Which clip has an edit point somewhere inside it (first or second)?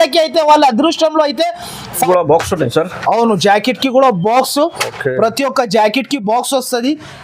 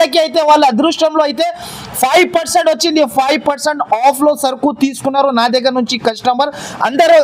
first